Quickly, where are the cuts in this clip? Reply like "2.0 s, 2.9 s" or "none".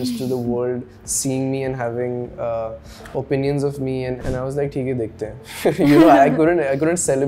4.2 s

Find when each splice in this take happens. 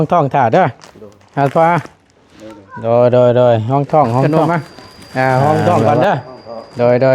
4.2 s

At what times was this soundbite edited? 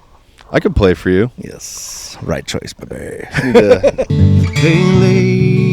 4.1 s

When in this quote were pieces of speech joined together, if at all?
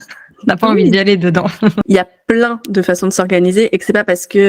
1.8 s

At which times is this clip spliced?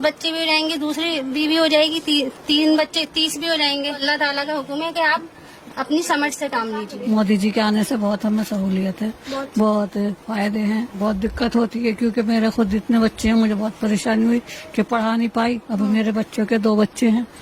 4.0 s, 7.0 s, 11.0 s

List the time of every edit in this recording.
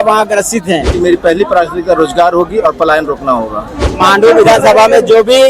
0.9 s, 3.9 s

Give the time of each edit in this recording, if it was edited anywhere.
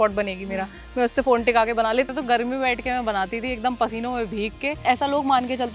2.1 s, 4.8 s

